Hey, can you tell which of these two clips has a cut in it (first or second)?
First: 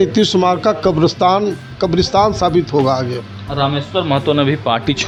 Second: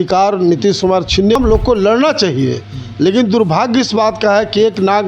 second